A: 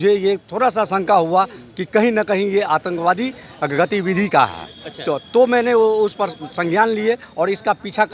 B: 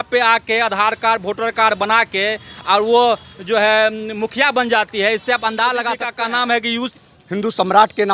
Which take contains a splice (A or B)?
B